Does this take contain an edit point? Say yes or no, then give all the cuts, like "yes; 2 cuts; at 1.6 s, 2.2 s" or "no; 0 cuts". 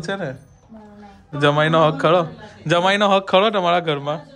yes; 1 cut; at 1.3 s